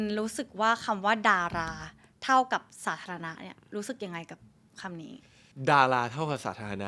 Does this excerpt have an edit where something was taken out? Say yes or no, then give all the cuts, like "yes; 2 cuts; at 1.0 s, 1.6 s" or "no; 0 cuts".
no; 0 cuts